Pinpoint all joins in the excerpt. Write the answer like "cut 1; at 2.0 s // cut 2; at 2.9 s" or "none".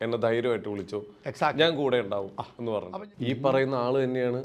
cut 1; at 2.9 s

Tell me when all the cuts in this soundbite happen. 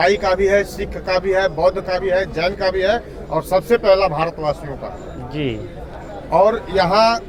none

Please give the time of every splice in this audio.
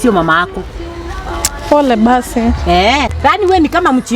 cut 1; at 3.1 s

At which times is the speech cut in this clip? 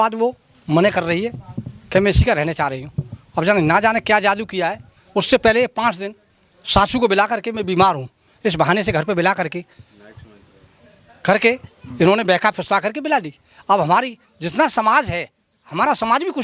none

